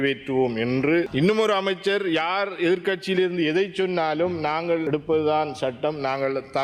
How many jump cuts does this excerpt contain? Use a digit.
2